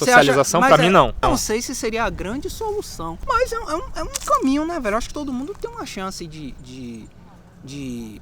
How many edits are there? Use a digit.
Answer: 2